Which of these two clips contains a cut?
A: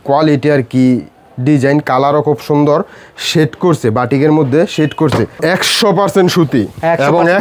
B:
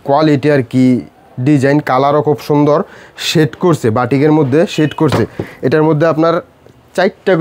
A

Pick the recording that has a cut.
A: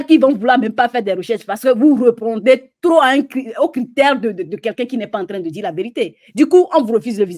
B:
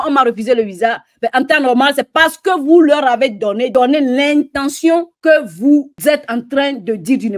B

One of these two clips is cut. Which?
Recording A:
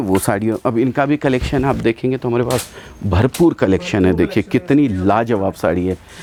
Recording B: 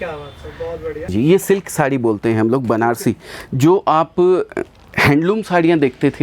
B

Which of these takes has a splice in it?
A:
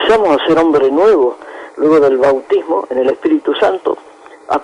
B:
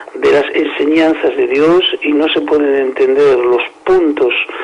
A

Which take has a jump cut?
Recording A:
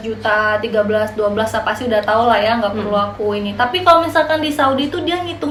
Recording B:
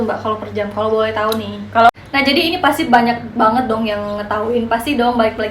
B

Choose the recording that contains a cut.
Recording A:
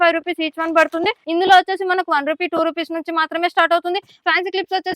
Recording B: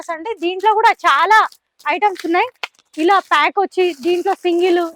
A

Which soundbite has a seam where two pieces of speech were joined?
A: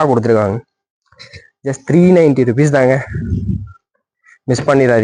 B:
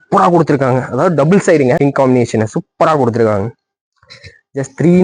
B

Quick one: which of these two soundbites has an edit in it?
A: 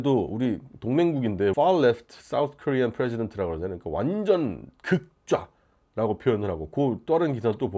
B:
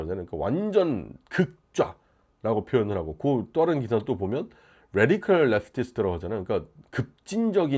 A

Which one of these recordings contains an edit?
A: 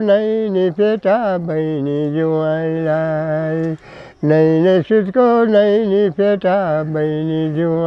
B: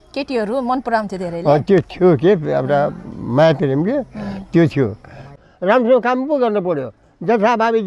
B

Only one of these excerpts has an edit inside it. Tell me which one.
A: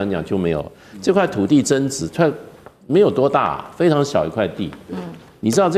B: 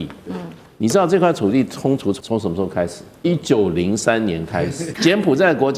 B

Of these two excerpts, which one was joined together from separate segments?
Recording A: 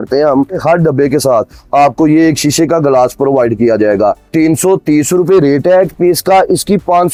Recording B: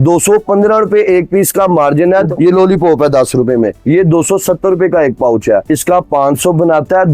B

